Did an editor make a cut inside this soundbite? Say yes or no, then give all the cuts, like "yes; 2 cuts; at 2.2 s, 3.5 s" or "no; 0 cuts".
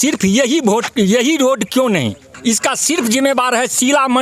yes; 1 cut; at 2.3 s